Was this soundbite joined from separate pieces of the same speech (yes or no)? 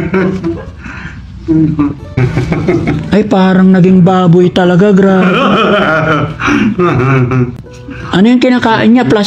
yes